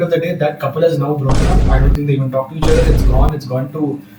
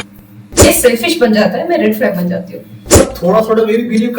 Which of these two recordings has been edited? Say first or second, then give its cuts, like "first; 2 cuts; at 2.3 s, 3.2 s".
second; 1 cut; at 2.9 s